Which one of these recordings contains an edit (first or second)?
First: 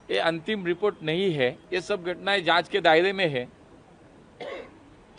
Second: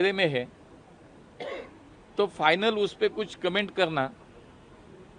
first